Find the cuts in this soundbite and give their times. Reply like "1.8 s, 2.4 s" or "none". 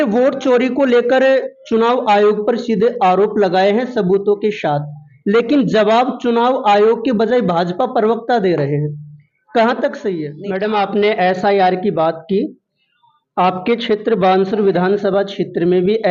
10.3 s